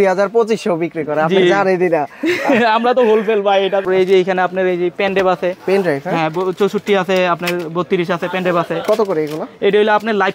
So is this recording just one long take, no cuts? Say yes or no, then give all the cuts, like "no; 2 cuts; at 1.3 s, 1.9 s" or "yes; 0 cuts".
no; 1 cut; at 3.8 s